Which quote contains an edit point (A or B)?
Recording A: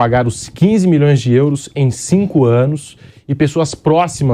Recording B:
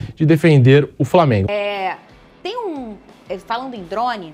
B